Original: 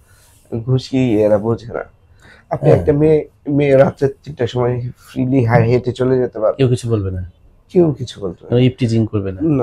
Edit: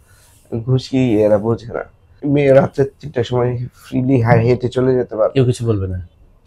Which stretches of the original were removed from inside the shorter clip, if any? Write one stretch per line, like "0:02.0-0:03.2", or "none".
0:02.1-0:03.4